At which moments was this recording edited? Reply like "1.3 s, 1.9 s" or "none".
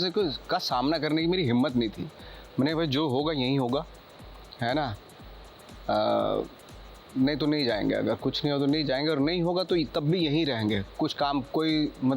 none